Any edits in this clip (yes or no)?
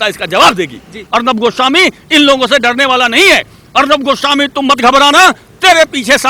yes